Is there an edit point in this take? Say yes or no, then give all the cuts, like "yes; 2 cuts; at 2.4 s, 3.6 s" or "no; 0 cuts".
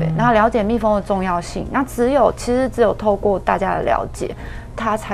no; 0 cuts